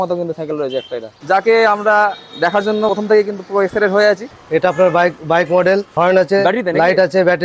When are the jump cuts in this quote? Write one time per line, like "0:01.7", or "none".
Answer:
0:01.2
0:04.3
0:05.9